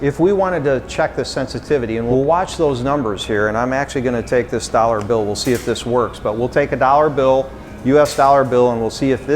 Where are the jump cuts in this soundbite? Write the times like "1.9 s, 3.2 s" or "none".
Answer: none